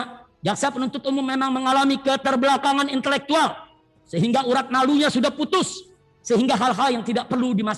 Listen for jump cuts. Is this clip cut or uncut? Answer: uncut